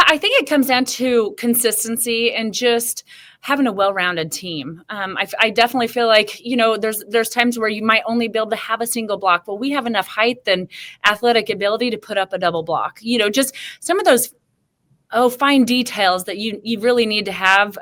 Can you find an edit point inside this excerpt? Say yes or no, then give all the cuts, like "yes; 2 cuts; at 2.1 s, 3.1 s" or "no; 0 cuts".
no; 0 cuts